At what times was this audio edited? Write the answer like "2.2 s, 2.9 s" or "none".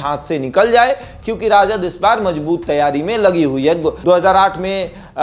3.9 s